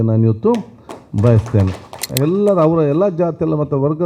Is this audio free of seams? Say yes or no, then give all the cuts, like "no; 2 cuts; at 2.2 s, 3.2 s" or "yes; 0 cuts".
no; 1 cut; at 2.0 s